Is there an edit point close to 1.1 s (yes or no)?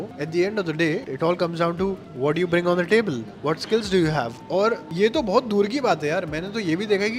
yes